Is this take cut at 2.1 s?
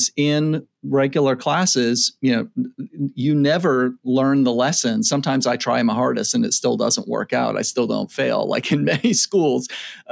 no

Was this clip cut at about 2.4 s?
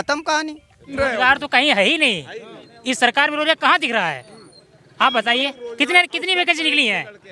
no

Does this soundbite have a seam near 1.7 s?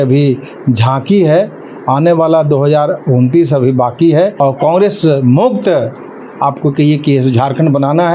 no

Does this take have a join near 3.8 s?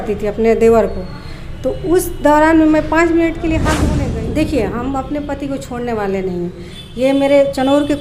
yes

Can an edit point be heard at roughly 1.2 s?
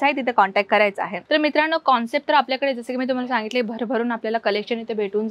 yes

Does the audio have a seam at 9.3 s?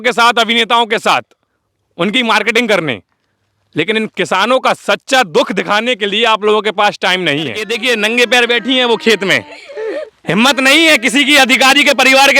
no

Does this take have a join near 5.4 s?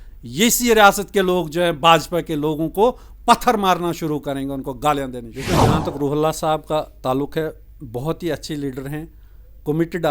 yes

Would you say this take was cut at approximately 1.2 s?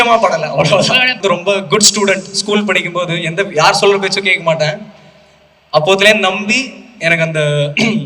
yes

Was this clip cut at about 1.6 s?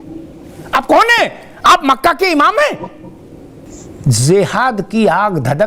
no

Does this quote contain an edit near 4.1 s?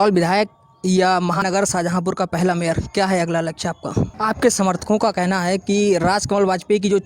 yes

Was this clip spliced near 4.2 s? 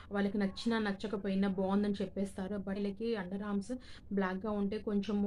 no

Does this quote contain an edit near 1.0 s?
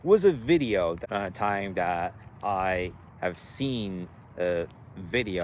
yes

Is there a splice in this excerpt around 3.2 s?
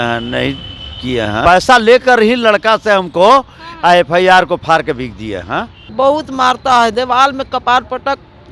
no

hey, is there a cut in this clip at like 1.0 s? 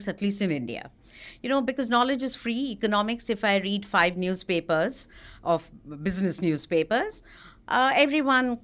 no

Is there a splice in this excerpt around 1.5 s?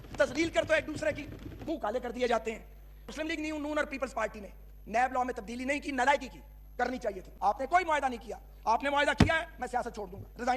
yes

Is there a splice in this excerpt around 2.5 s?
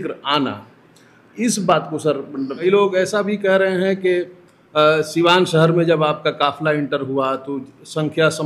yes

